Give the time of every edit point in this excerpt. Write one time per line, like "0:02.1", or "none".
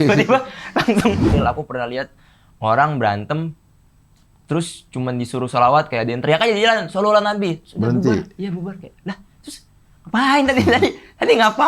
0:01.3